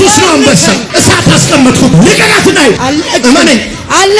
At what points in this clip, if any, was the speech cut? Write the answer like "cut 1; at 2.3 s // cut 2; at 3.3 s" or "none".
cut 1; at 0.8 s // cut 2; at 1.9 s // cut 3; at 2.8 s